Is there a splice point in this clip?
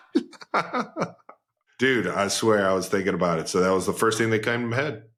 no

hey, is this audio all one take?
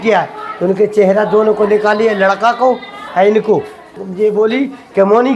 no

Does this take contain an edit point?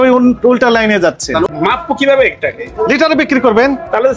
yes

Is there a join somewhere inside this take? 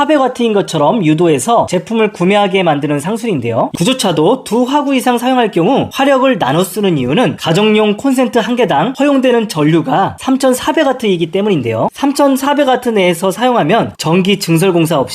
yes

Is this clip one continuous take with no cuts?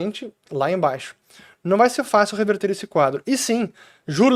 yes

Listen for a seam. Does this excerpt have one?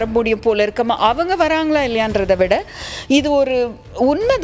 no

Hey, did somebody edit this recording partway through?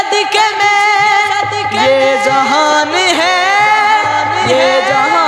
no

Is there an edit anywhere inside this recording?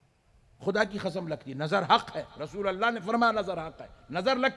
no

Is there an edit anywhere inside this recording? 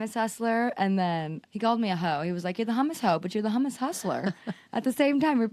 no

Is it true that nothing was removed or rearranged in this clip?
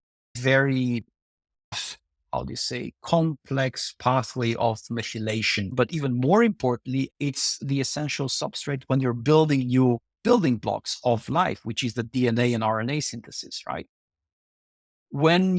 no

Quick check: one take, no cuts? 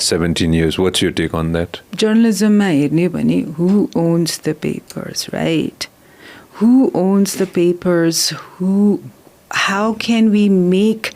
no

